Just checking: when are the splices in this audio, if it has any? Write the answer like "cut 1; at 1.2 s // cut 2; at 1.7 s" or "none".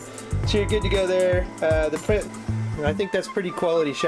cut 1; at 2.3 s